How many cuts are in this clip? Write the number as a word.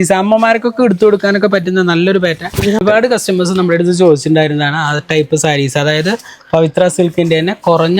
one